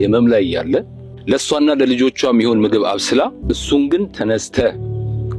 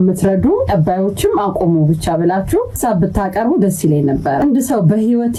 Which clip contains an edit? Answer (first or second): first